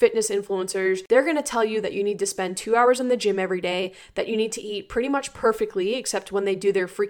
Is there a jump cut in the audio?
yes; 1 cut; at 1.2 s

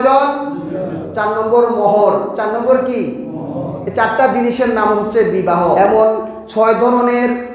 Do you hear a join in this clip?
yes; 1 cut; at 5.8 s

